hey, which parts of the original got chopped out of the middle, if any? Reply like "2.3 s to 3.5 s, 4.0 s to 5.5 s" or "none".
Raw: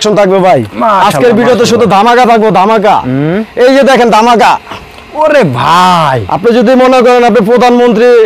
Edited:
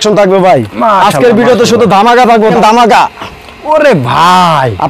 2.5 s to 4.0 s